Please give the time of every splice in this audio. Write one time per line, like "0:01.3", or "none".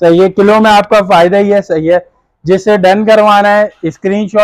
none